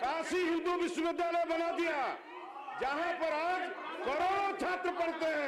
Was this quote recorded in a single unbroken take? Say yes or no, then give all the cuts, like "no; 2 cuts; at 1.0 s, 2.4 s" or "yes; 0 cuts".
yes; 0 cuts